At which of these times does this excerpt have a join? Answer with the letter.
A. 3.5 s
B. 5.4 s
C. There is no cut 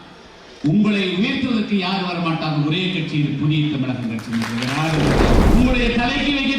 B